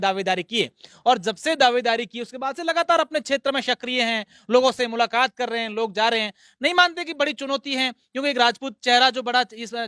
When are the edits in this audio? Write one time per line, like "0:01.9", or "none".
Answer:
none

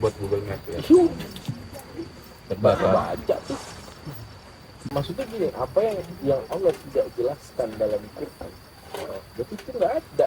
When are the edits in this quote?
0:04.9

